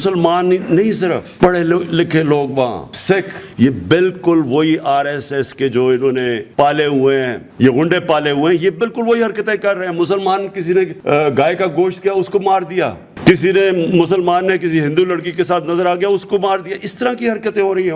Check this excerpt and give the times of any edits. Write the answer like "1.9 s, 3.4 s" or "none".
3.4 s, 6.4 s, 7.4 s, 11.0 s